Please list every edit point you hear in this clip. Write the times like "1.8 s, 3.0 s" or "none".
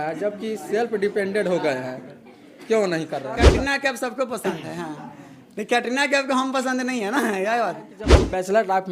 3.4 s, 8.0 s